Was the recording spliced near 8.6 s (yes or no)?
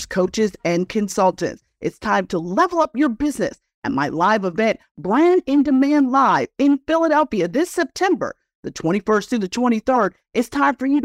no